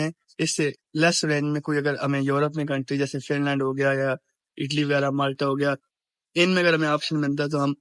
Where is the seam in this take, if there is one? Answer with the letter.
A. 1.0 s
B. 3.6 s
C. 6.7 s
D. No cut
D